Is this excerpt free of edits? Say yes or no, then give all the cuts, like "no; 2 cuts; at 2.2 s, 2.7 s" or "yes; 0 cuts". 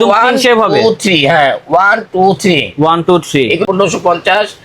no; 1 cut; at 3.6 s